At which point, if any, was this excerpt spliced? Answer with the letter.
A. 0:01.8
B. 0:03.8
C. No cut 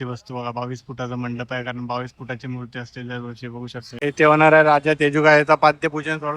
B